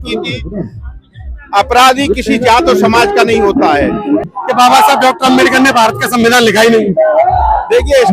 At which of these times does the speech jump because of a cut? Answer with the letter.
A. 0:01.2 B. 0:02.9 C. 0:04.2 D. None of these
C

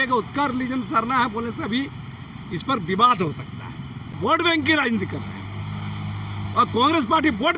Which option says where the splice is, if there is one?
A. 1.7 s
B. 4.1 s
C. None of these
B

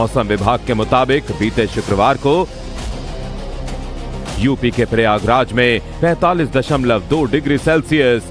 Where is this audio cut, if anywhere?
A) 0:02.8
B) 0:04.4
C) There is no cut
A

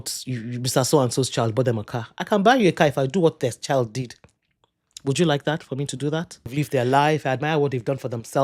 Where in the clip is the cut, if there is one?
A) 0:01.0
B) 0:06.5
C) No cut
B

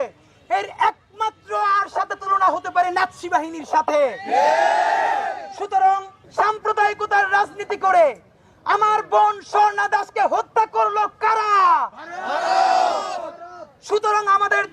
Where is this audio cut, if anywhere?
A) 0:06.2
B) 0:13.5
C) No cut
A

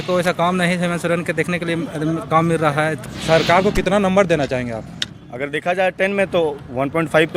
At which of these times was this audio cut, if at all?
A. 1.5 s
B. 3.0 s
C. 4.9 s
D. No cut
B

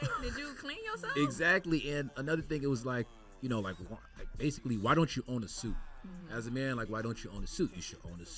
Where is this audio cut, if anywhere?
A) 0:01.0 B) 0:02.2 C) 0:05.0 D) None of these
D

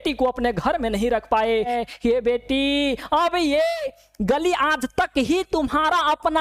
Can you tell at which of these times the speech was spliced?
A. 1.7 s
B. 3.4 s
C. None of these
A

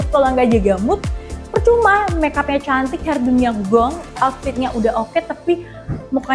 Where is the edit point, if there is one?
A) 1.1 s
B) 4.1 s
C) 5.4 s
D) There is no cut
B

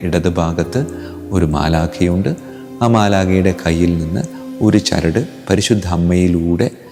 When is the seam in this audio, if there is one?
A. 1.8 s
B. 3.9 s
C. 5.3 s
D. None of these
D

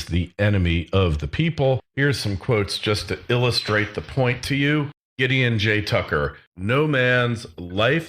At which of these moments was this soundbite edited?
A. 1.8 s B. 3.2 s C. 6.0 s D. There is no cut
C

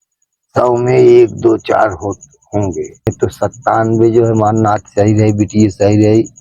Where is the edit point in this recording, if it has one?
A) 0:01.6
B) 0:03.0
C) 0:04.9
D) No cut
B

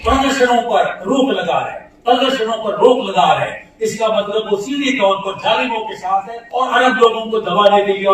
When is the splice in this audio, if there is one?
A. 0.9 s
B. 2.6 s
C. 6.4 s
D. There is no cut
C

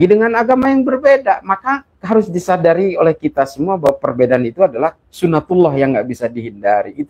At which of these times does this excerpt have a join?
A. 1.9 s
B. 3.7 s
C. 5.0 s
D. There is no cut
A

